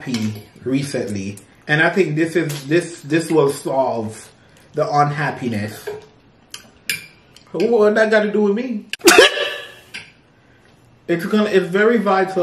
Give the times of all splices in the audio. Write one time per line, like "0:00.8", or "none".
none

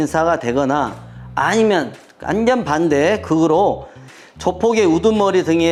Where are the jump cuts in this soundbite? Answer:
none

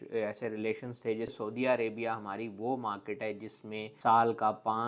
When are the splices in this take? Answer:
0:01.3

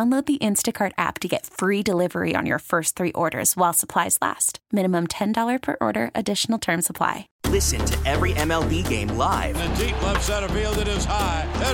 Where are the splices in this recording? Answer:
0:07.3

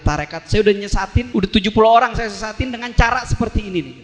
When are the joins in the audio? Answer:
0:01.2

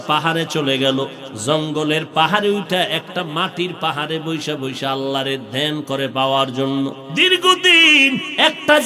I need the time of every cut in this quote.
0:01.3
0:07.0

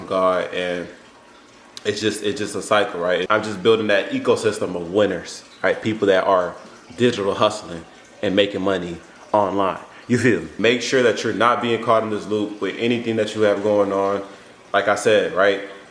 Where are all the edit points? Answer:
0:10.5

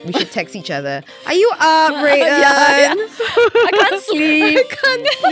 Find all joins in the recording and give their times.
none

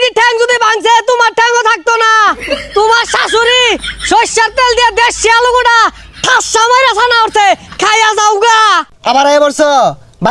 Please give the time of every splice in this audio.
0:08.9

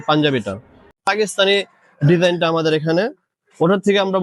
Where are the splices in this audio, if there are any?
0:01.1

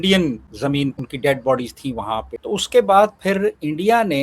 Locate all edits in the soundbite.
0:01.0
0:02.4

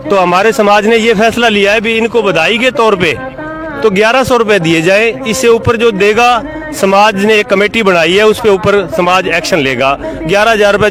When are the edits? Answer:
none

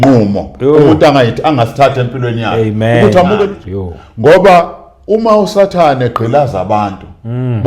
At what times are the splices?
0:03.6

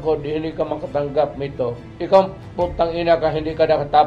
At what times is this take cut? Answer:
0:01.9

